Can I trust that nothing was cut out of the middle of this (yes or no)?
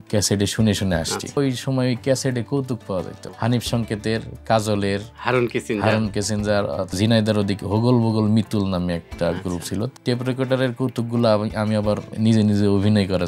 no